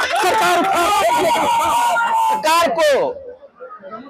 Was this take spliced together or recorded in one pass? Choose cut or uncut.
cut